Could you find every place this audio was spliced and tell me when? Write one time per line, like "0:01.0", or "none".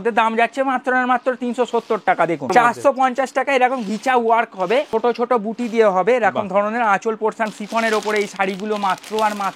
0:02.5
0:04.9
0:07.5